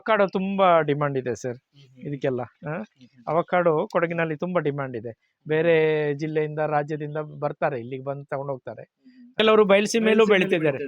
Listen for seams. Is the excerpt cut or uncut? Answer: cut